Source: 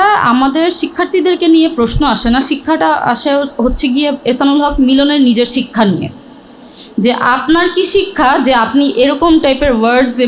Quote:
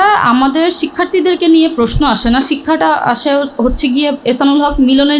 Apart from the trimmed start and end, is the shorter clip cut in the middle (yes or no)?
no